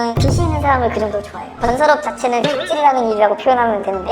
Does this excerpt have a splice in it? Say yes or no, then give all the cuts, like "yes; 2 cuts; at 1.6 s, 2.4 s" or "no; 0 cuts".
yes; 1 cut; at 1.6 s